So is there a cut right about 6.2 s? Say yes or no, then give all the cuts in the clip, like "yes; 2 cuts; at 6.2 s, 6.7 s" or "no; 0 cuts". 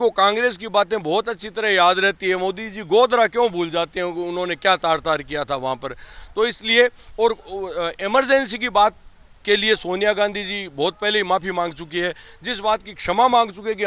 no; 0 cuts